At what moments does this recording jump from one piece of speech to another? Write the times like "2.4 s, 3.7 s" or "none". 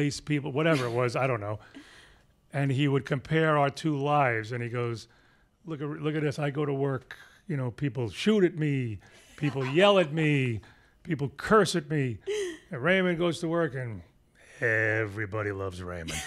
none